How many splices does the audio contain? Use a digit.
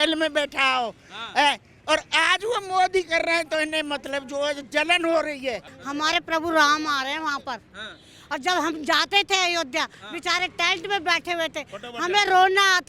1